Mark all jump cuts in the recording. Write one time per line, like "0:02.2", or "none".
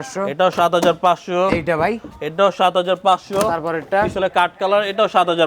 none